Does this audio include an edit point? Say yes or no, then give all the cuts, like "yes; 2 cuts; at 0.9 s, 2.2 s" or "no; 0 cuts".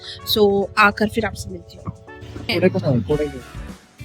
yes; 1 cut; at 2.5 s